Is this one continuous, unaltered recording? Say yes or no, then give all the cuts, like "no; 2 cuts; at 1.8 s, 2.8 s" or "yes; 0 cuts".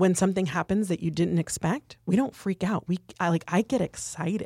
yes; 0 cuts